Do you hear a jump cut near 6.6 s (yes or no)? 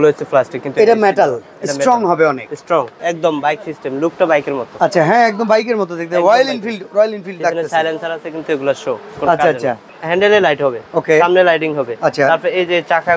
no